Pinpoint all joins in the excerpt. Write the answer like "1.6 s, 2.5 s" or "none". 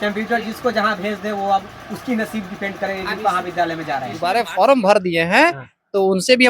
4.2 s